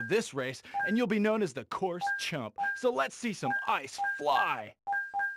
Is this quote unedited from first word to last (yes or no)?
yes